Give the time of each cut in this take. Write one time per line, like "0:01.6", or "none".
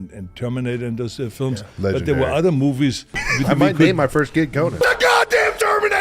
0:04.7